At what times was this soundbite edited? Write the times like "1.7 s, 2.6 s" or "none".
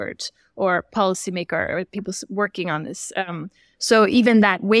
none